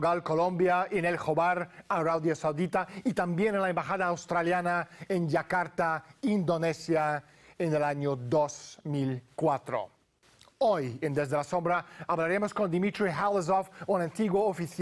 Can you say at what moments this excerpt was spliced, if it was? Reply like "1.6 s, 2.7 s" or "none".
7.4 s